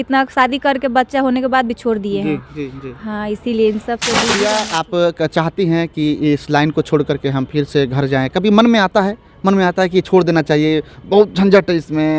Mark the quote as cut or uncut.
cut